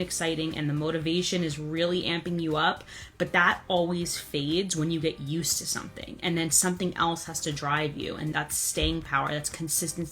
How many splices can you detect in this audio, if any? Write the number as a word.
one